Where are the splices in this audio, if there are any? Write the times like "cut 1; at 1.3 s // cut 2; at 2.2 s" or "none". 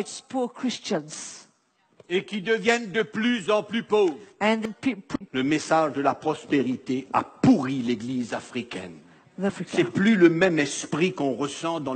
cut 1; at 4.6 s // cut 2; at 9.5 s